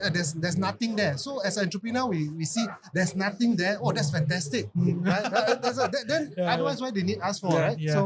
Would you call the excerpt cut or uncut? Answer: uncut